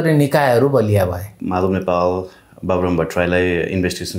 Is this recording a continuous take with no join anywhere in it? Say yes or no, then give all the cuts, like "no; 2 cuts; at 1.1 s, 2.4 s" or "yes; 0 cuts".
no; 1 cut; at 1.3 s